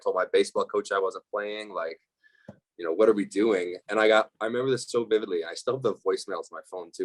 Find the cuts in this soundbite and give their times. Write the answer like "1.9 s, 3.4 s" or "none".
none